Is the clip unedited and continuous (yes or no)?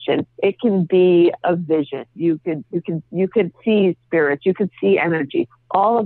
no